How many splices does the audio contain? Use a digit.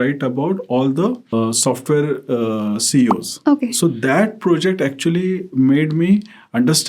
2